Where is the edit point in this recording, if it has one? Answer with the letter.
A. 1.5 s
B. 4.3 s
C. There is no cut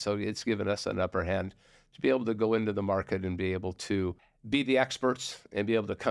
B